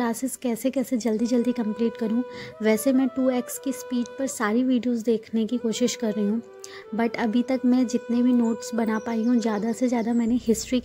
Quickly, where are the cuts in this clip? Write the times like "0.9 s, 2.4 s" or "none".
none